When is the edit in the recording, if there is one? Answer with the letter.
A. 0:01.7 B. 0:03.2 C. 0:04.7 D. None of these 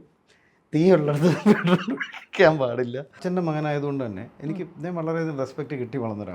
B